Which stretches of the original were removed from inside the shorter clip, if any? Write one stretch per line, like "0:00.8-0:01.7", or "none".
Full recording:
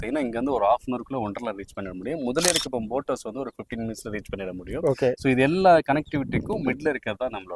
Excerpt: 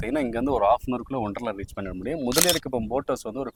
none